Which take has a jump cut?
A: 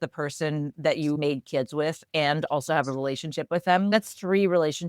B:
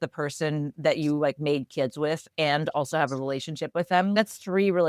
A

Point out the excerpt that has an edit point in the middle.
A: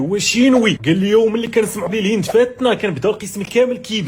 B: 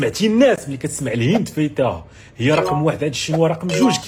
A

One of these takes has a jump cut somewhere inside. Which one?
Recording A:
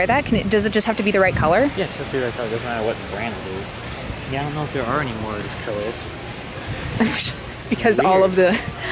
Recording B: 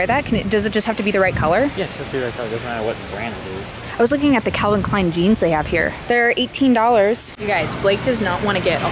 B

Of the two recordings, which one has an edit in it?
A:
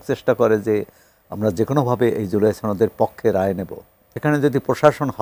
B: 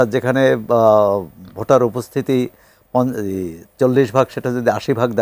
A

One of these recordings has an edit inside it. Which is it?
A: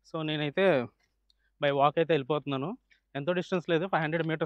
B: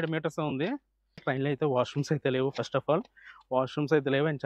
B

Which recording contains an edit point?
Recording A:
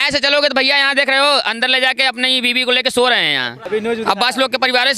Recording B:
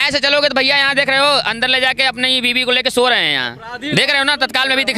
A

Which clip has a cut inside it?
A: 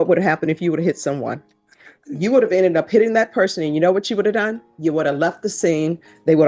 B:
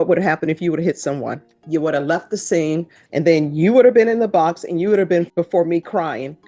B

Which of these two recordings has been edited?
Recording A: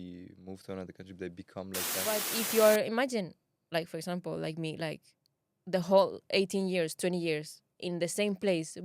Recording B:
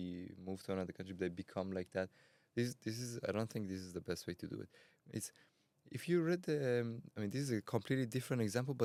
A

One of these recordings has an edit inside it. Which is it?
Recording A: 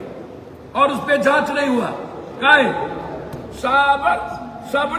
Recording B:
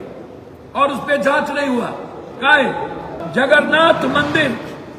B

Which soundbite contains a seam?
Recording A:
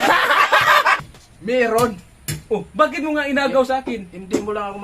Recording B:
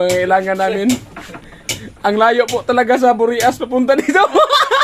A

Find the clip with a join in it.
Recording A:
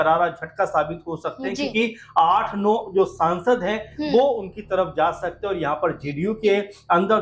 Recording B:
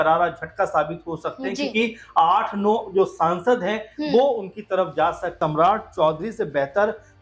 B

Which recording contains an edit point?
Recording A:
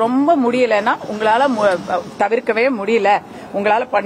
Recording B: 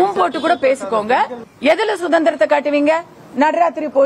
B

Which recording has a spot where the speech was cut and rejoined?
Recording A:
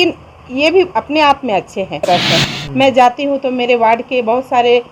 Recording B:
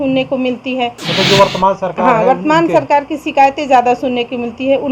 A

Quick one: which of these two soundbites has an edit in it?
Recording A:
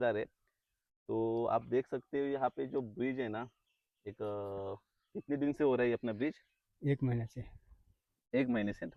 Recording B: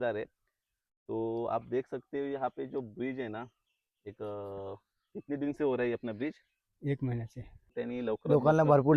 B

